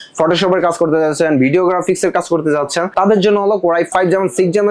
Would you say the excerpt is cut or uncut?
cut